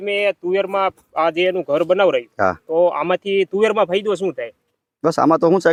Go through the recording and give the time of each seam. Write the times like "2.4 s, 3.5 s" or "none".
none

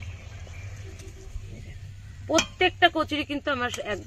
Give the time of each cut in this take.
1.3 s

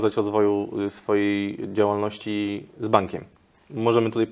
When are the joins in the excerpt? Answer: none

